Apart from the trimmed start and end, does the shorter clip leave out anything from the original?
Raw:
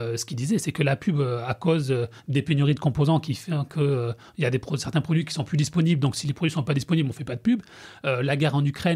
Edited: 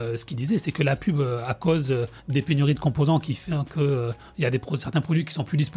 no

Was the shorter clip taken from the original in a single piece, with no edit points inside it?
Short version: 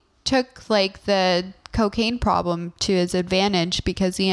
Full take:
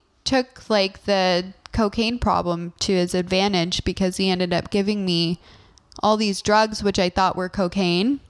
yes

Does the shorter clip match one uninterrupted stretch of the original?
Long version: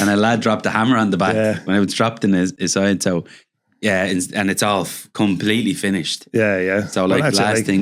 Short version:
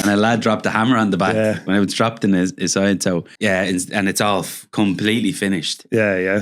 no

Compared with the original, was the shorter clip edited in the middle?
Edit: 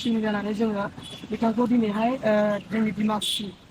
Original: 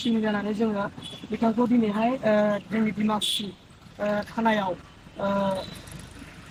no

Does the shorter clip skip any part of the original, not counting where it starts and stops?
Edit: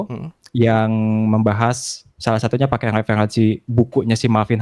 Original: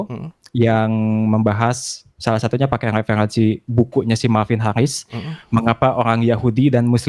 no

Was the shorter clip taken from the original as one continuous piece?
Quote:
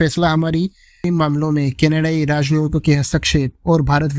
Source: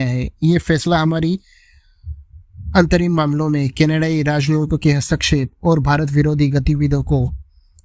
no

